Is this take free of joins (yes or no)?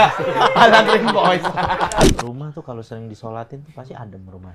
no